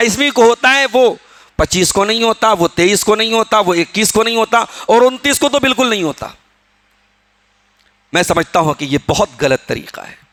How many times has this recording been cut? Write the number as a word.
zero